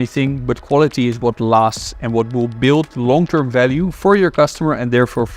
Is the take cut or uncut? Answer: uncut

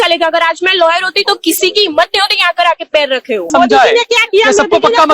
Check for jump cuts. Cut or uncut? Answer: cut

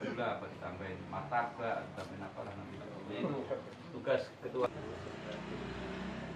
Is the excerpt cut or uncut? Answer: cut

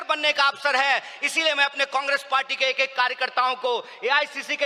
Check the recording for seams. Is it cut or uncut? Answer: uncut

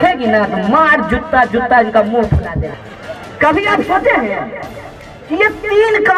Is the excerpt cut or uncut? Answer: cut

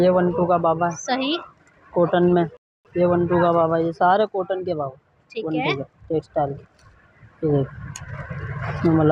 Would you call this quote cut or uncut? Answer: uncut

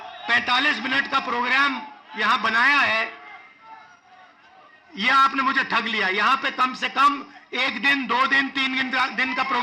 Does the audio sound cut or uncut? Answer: uncut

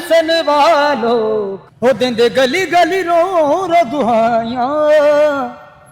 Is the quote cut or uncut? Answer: cut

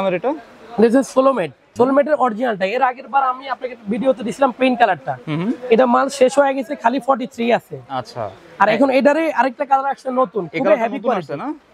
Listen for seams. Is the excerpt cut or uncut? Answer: cut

